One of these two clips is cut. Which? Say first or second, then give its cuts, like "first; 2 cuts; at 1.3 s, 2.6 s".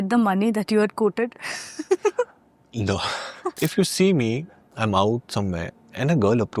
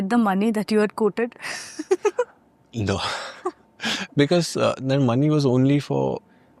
first; 1 cut; at 3.6 s